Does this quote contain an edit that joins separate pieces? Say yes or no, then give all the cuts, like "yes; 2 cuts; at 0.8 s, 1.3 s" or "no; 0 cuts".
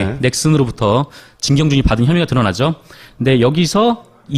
yes; 1 cut; at 2.9 s